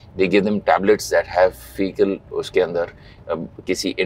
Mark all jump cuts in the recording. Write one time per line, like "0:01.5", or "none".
0:02.2